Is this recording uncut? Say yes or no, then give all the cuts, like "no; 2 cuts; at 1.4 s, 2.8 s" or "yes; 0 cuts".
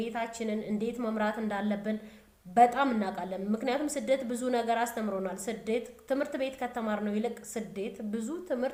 yes; 0 cuts